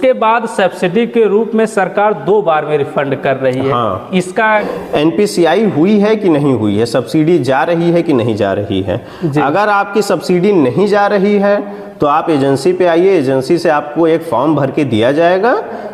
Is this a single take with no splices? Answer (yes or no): no